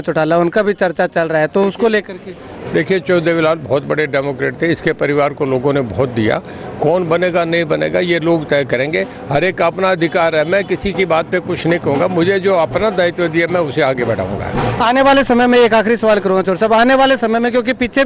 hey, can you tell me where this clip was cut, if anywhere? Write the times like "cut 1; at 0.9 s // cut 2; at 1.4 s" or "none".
none